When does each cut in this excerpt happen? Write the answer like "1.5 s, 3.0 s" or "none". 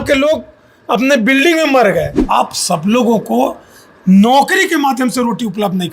2.2 s